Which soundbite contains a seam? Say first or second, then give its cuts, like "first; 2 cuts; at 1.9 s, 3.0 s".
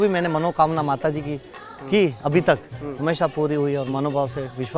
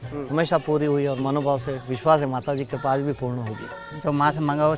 second; 1 cut; at 3.8 s